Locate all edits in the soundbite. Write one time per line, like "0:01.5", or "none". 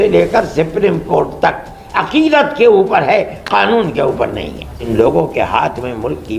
0:04.9